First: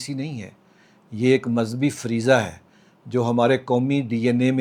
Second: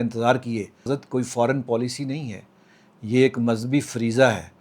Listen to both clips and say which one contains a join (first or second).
second